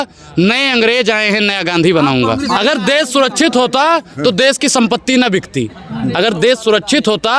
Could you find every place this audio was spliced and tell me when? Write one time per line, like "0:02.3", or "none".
0:02.4